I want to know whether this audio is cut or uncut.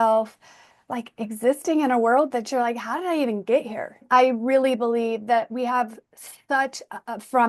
cut